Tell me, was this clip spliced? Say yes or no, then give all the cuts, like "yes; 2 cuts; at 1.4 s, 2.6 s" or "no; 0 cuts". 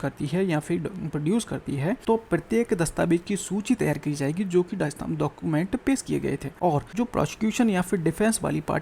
yes; 2 cuts; at 2.0 s, 6.8 s